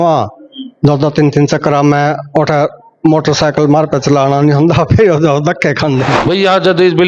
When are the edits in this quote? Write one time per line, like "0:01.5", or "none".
0:06.1